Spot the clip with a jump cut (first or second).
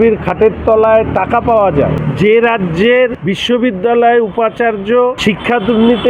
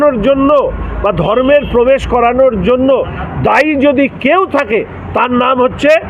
first